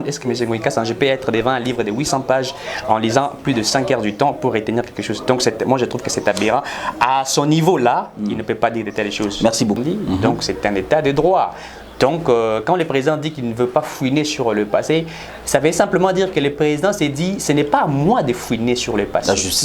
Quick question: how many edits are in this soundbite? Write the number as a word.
one